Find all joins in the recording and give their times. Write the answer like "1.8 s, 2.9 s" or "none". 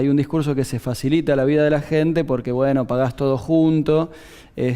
1.9 s